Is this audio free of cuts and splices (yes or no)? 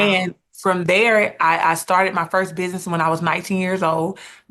yes